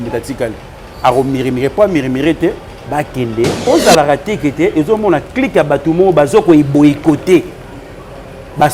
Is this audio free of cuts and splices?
no; 1 cut; at 3.6 s

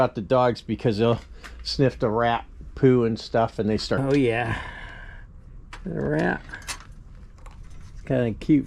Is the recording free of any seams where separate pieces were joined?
no; 1 cut; at 4.0 s

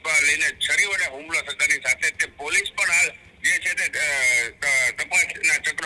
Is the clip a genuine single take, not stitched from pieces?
yes; 0 cuts

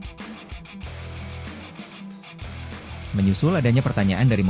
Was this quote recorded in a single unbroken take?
no; 1 cut; at 2.8 s

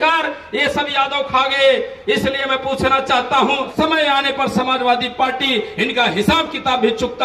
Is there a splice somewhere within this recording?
yes; 1 cut; at 3.7 s

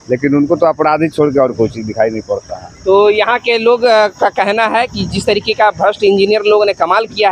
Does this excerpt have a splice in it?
no; 0 cuts

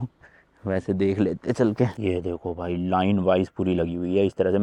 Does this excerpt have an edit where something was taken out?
no; 0 cuts

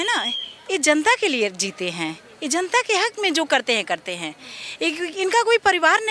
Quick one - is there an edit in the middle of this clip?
no; 0 cuts

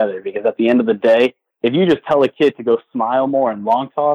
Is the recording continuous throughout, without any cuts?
no; 1 cut; at 1.4 s

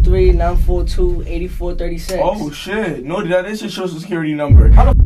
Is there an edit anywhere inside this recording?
no; 0 cuts

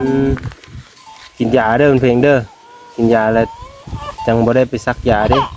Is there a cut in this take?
no; 0 cuts

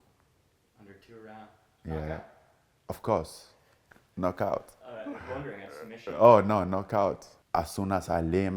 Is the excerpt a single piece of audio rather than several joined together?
no; 1 cut; at 7.3 s

